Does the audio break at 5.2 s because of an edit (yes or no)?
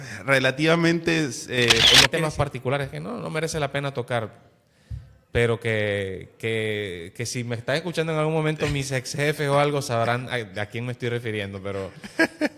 no